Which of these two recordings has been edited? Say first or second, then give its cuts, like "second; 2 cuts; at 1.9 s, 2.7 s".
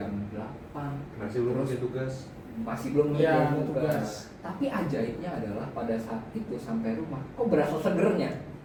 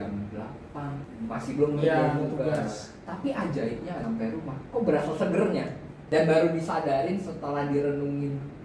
second; 3 cuts; at 1.0 s, 4.0 s, 6.0 s